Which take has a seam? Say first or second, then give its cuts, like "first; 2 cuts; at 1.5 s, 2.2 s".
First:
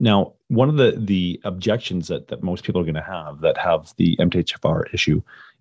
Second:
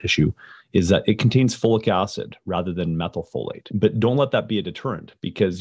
second; 1 cut; at 3.6 s